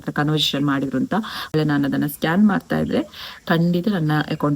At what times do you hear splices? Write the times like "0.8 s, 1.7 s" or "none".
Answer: 1.5 s